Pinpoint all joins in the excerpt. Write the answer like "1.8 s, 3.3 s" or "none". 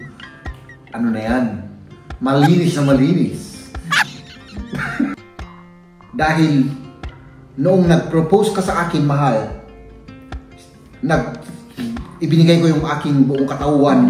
5.6 s